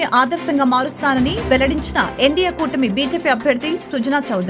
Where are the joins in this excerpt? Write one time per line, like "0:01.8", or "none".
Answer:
none